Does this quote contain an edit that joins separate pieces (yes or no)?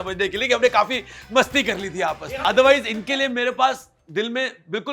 yes